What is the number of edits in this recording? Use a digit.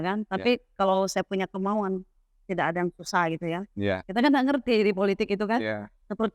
1